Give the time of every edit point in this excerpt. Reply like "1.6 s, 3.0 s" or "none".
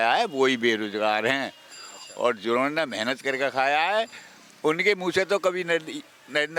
none